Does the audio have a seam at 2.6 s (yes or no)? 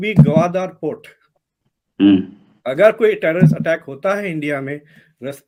no